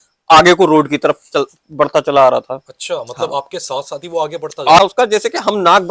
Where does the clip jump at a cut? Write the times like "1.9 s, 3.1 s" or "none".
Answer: 4.8 s